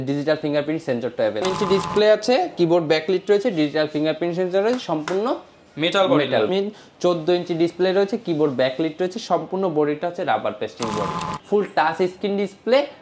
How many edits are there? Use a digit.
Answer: 3